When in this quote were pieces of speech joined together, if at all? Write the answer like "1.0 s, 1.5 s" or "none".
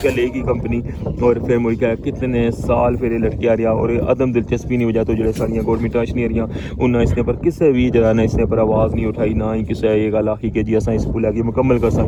none